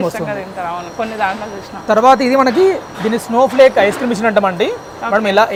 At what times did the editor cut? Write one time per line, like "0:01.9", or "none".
none